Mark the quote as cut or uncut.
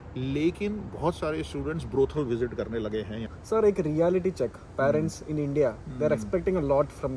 cut